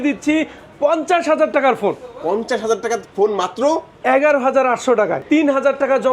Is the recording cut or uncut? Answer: cut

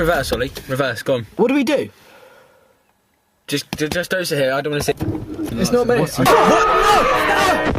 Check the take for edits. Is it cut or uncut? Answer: cut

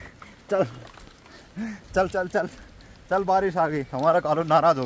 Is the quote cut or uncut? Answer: uncut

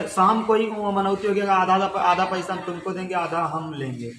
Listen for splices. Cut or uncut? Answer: uncut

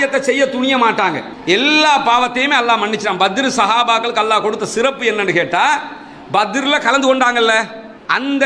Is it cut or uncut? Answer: cut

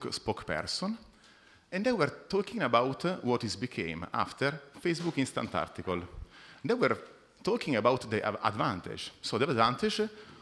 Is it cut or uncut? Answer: cut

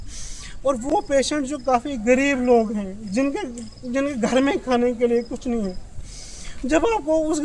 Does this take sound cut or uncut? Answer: uncut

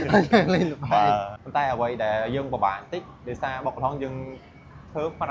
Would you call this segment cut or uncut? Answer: cut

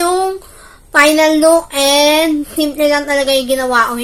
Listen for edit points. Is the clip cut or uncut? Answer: uncut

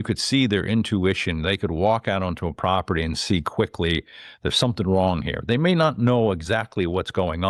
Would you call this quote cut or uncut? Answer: uncut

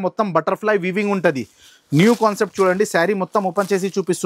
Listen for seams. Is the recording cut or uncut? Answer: uncut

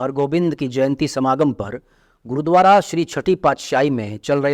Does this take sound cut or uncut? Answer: uncut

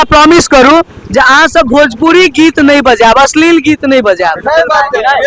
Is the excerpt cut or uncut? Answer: uncut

